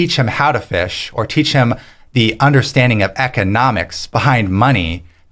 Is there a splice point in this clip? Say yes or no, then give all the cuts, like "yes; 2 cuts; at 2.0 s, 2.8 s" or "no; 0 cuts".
no; 0 cuts